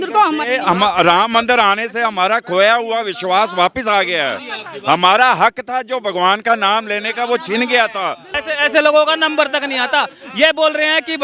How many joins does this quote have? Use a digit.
1